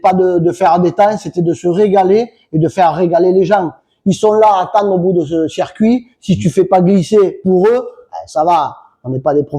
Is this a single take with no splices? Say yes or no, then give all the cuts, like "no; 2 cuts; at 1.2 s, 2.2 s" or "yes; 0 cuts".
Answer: yes; 0 cuts